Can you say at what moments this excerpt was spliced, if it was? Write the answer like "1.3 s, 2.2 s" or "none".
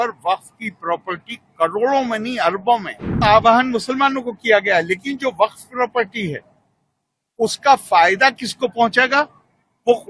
3.2 s